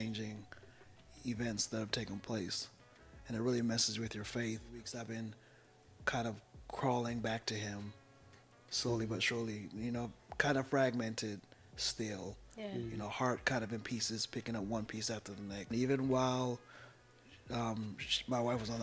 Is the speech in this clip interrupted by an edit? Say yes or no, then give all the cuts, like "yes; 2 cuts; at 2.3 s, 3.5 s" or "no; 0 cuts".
yes; 2 cuts; at 5.0 s, 15.7 s